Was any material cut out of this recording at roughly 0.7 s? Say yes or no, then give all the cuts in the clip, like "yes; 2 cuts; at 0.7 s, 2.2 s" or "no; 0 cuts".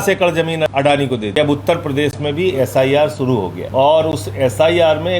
yes; 2 cuts; at 0.7 s, 3.6 s